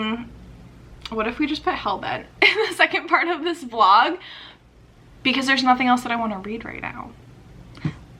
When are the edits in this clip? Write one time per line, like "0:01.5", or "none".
none